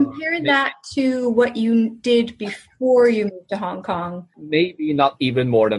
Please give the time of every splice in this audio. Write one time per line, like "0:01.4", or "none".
0:04.4

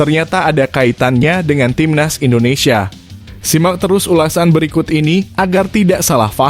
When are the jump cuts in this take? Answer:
none

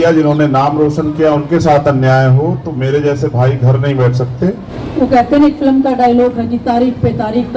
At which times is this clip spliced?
0:04.7

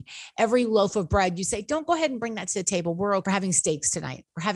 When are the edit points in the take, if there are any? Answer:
0:03.2

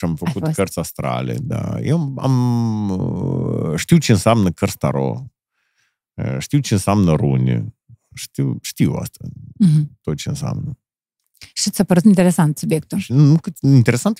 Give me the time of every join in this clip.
none

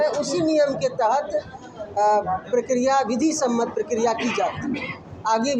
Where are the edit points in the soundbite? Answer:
none

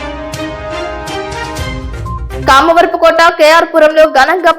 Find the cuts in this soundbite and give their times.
0:01.8

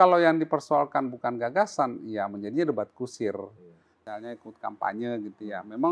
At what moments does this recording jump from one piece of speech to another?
0:04.0

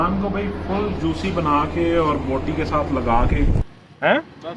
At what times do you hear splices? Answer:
0:03.6

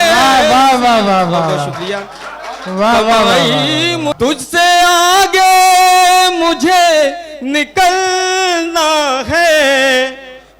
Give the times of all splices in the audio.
0:04.1

